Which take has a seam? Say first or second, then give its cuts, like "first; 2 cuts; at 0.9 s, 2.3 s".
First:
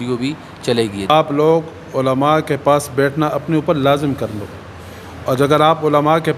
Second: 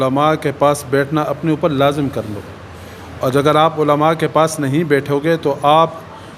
first; 1 cut; at 1.1 s